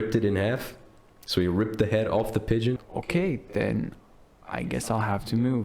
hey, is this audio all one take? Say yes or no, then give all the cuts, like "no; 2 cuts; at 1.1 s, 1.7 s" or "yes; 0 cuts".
no; 1 cut; at 2.8 s